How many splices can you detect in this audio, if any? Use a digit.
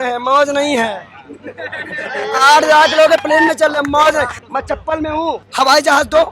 2